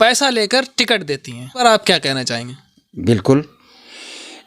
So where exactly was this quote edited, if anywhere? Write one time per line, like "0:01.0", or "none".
0:01.6